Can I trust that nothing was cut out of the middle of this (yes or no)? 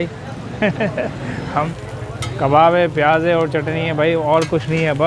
no